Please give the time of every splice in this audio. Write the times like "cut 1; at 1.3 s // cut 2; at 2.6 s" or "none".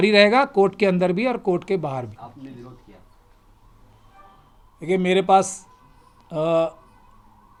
none